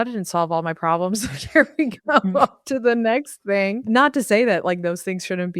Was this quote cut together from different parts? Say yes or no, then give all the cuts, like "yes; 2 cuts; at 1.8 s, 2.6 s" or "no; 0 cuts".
yes; 1 cut; at 3.8 s